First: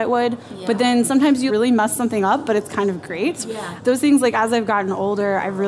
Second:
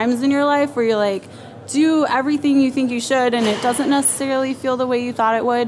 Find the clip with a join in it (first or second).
first